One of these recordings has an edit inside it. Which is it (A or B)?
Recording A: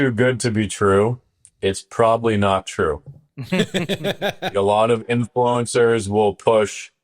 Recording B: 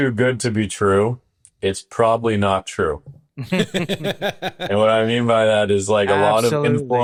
A